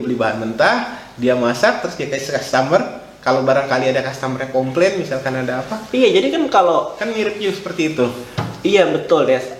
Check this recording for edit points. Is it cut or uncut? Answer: uncut